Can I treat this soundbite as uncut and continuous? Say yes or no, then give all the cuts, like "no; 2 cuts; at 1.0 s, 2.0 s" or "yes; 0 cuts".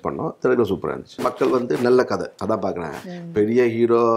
no; 2 cuts; at 1.2 s, 2.3 s